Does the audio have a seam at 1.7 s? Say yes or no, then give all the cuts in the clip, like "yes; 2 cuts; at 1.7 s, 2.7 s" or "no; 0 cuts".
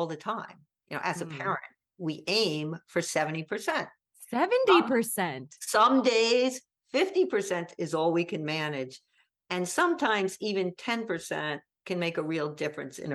no; 0 cuts